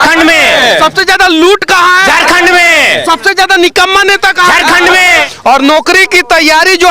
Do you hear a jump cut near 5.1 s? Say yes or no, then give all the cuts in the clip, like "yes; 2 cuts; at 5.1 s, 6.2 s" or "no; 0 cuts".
yes; 1 cut; at 5.1 s